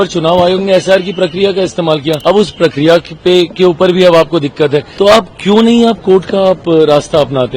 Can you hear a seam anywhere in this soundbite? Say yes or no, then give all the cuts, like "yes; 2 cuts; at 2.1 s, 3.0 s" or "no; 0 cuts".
yes; 2 cuts; at 2.2 s, 4.9 s